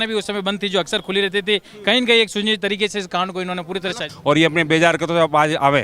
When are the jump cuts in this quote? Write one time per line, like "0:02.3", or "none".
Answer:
0:04.0